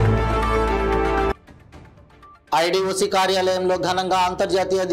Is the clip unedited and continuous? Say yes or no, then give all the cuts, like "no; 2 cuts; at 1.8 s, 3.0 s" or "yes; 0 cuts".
yes; 0 cuts